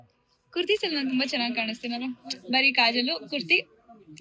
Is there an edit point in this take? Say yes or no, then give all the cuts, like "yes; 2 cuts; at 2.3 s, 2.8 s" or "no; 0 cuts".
no; 0 cuts